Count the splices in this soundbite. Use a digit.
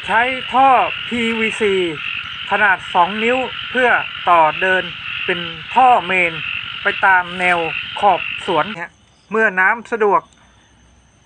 1